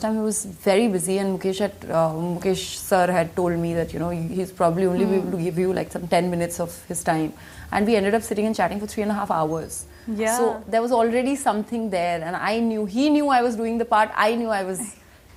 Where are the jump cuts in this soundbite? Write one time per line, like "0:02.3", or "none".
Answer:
none